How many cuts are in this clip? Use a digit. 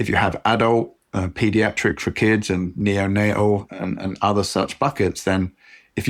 0